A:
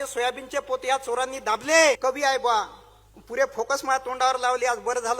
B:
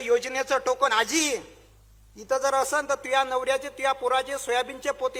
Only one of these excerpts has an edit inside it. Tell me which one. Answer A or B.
A